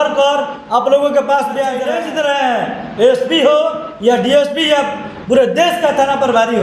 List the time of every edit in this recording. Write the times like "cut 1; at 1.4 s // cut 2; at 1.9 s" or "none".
cut 1; at 1.9 s